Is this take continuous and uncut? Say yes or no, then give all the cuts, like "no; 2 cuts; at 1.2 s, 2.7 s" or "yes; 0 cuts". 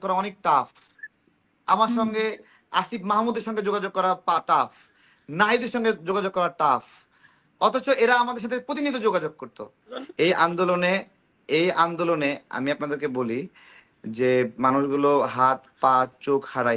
no; 1 cut; at 10.0 s